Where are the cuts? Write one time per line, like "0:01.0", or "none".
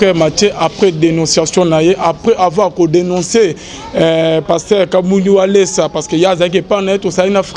none